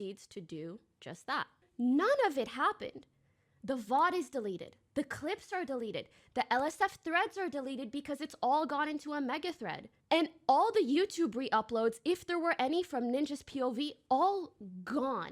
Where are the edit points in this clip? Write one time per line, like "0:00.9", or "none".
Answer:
0:01.6